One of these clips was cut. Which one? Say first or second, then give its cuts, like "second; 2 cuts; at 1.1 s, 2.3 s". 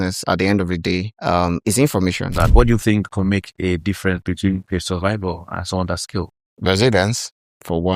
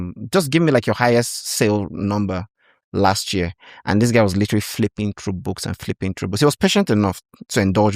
first; 2 cuts; at 1.1 s, 2.4 s